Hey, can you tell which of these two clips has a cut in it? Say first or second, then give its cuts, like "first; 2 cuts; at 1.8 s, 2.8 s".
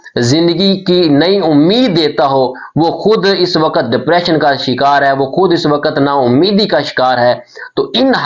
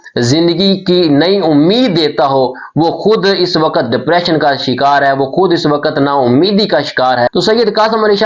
second; 1 cut; at 7.3 s